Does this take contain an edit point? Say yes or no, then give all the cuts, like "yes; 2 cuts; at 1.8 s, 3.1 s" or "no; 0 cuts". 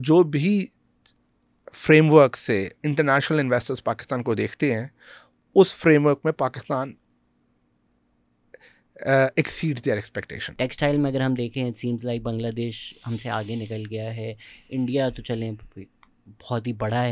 yes; 1 cut; at 10.4 s